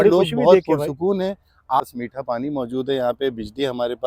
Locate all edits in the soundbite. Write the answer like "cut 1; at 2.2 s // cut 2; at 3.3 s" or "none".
cut 1; at 1.8 s